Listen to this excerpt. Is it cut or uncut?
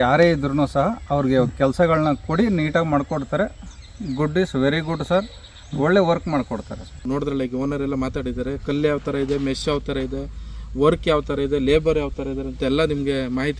uncut